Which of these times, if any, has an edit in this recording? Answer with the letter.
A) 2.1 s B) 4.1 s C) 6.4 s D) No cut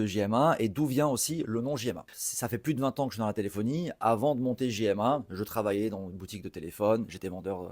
A